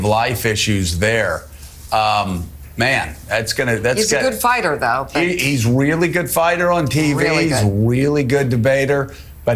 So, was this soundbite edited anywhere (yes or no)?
no